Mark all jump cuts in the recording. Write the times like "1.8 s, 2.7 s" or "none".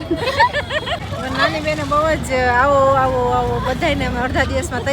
1.0 s